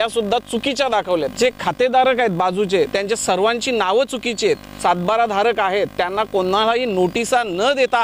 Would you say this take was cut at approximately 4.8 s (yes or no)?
yes